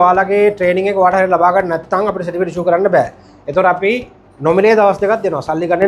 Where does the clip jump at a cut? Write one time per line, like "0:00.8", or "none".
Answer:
none